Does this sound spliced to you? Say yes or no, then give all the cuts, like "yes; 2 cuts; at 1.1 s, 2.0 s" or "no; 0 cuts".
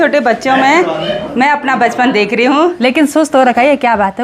yes; 1 cut; at 2.8 s